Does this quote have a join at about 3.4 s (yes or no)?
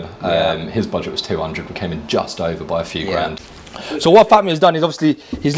yes